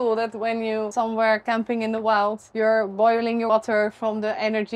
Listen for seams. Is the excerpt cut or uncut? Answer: cut